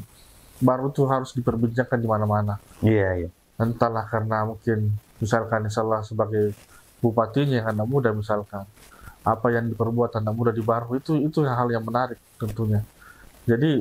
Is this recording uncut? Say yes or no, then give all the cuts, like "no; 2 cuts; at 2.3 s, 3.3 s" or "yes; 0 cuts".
yes; 0 cuts